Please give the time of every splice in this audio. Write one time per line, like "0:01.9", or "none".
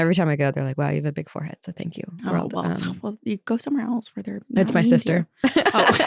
none